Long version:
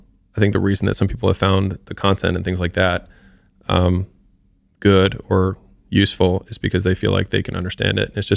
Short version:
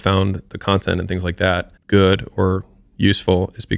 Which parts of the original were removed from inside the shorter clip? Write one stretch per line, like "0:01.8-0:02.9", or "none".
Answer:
0:03.1-0:04.7